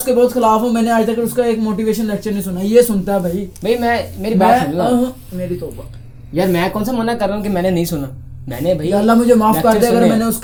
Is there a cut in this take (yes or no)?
no